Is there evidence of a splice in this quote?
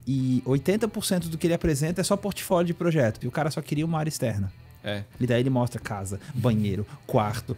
yes; 1 cut; at 3.2 s

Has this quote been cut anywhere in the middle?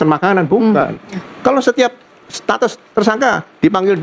yes; 1 cut; at 1.3 s

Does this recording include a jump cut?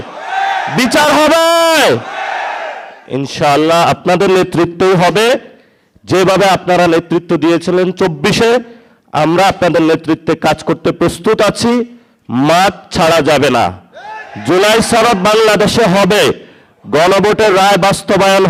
no; 0 cuts

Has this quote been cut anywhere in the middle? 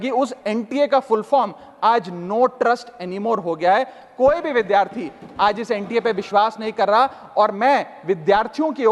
no; 0 cuts

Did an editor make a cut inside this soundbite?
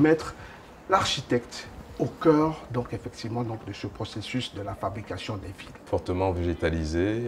yes; 1 cut; at 5.8 s

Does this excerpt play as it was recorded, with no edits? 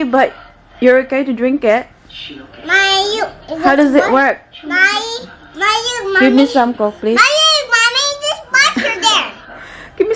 yes; 0 cuts

